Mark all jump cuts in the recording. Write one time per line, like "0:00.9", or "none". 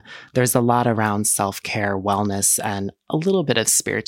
none

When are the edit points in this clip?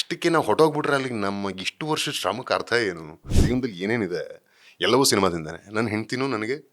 0:03.3

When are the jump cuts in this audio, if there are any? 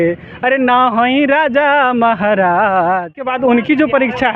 0:03.3

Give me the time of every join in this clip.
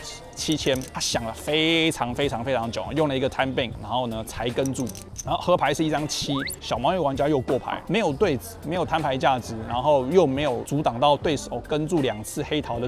0:00.9
0:03.8
0:07.7

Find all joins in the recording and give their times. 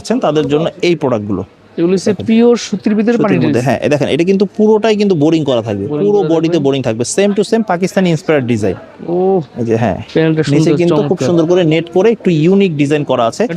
none

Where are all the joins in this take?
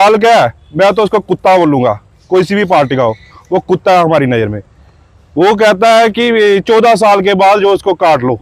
none

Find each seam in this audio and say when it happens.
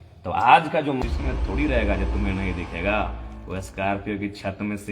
0:01.0

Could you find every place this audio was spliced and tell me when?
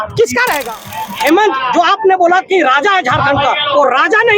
0:01.1

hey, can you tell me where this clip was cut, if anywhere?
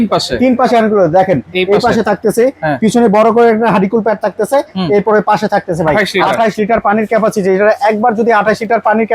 0:06.1

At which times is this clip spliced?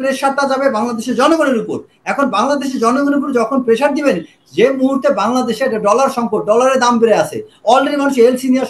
none

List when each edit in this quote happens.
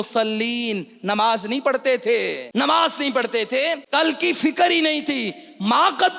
0:02.4
0:03.8

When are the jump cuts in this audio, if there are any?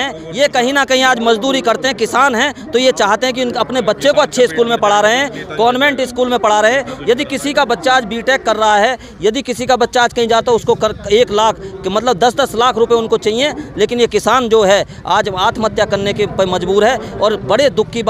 none

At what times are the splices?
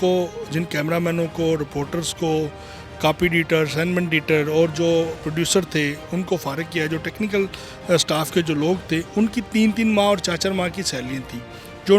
none

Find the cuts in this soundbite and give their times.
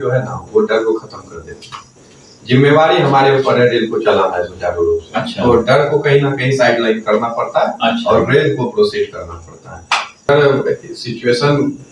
0:10.3

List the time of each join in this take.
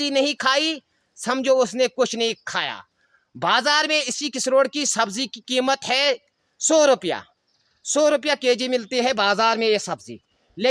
none

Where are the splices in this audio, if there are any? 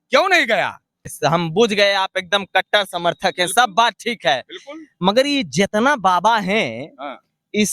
0:01.1

